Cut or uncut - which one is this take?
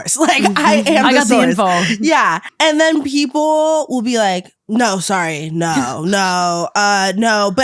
cut